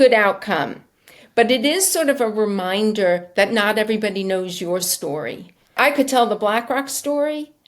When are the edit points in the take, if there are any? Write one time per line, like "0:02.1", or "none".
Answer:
0:05.7